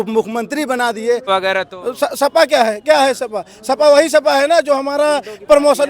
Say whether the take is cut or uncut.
cut